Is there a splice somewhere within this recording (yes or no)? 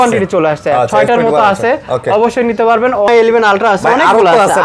yes